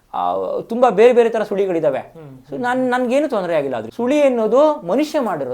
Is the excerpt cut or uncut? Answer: cut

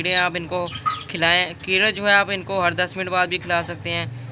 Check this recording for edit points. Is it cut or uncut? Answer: uncut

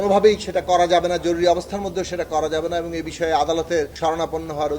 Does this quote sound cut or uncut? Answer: uncut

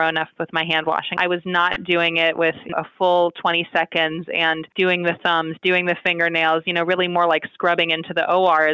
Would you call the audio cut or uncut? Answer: cut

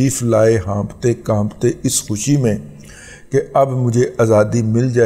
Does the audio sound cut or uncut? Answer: uncut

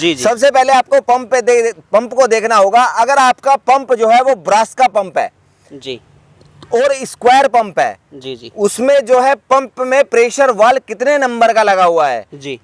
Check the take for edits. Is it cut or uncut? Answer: uncut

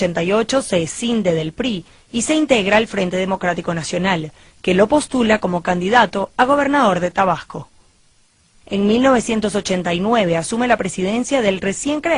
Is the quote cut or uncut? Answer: cut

